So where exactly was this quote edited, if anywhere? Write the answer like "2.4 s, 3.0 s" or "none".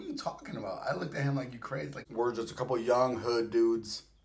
2.0 s